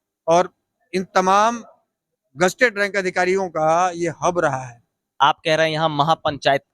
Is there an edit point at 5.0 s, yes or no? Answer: yes